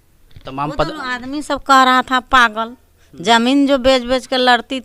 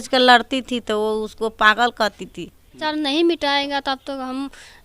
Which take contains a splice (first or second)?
second